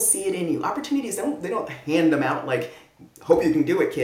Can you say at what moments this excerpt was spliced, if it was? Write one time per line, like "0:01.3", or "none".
none